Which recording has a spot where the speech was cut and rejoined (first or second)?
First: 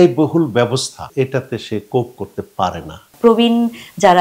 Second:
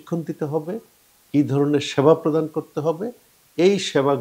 first